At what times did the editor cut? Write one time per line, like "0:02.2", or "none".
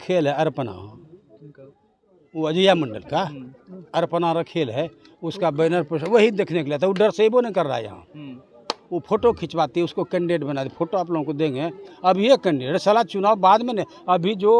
none